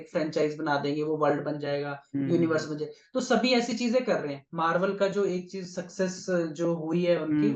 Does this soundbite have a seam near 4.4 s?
yes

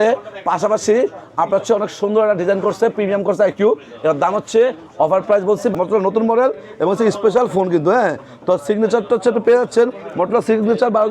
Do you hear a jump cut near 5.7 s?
yes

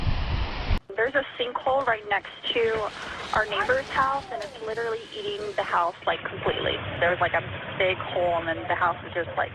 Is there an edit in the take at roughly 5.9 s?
no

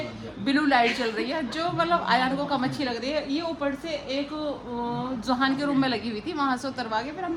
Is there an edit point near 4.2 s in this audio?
no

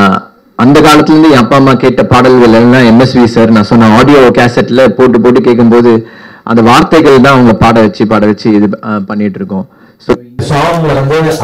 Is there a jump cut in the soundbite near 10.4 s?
yes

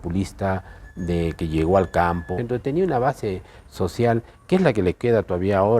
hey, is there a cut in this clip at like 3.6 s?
no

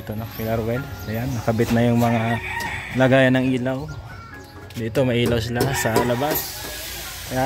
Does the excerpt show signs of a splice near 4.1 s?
no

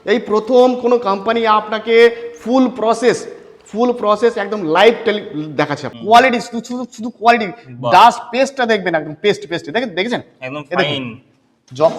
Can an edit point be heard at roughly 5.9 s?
yes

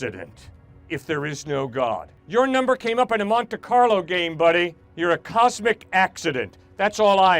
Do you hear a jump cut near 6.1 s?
no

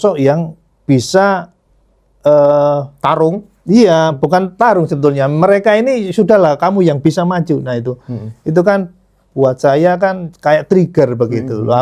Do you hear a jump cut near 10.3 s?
no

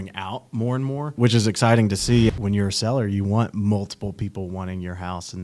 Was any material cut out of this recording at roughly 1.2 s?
yes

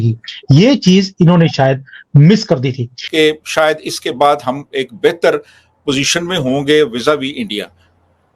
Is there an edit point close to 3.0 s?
yes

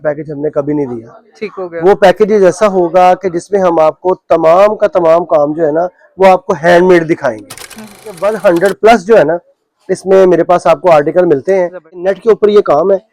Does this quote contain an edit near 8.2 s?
yes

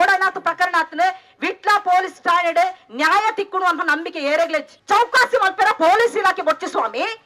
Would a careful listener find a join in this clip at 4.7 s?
yes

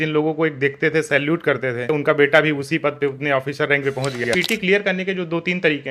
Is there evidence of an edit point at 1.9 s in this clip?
yes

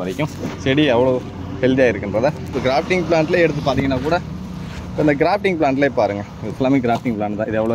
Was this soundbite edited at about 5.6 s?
no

